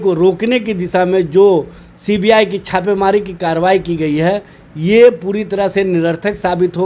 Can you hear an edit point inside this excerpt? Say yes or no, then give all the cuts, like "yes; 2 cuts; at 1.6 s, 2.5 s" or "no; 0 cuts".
no; 0 cuts